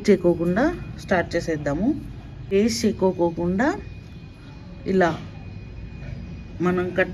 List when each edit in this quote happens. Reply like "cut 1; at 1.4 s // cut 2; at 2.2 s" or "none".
cut 1; at 2.5 s

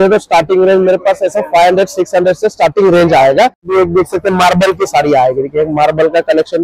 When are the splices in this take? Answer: cut 1; at 3.7 s

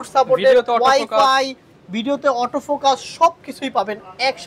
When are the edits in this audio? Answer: none

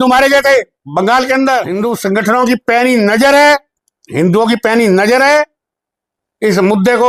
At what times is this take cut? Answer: cut 1; at 1.7 s

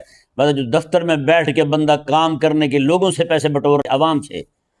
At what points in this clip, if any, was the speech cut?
cut 1; at 3.8 s

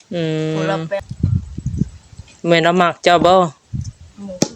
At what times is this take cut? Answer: cut 1; at 1.0 s

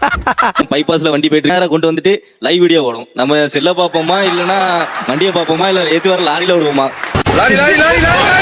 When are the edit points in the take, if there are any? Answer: cut 1; at 1.5 s

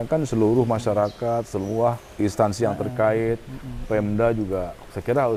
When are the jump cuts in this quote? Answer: none

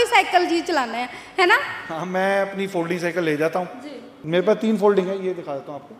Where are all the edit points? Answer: cut 1; at 4.1 s

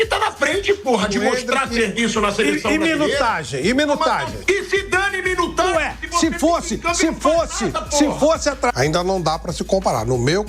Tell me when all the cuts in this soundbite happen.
cut 1; at 4.3 s // cut 2; at 8.7 s

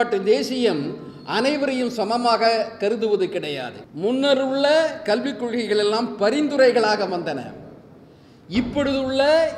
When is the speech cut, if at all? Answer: cut 1; at 3.8 s

